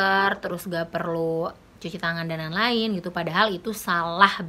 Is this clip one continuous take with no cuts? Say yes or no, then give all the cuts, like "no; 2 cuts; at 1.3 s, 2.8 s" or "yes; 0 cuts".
yes; 0 cuts